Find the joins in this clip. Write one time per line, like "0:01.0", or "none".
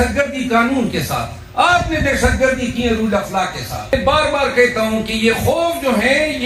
0:03.9